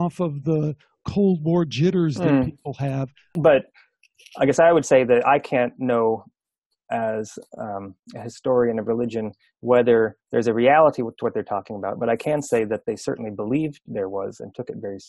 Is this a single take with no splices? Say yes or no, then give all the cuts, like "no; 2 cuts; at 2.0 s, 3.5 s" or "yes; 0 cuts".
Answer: no; 1 cut; at 3.4 s